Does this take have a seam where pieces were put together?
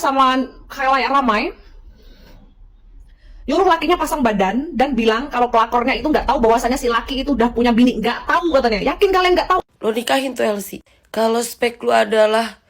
yes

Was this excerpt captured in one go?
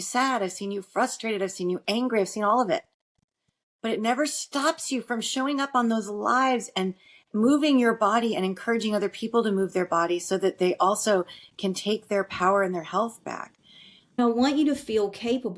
no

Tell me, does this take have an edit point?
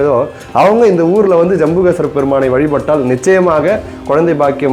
no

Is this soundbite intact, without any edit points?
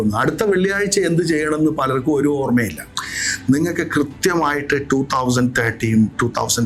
yes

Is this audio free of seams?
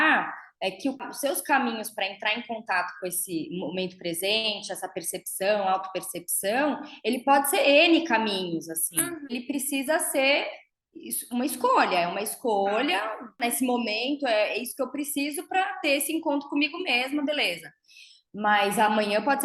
no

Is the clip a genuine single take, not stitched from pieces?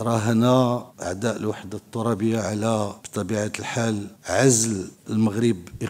no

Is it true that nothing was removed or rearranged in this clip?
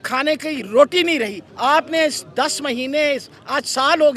no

